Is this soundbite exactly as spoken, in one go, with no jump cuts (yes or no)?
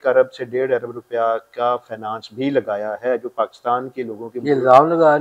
yes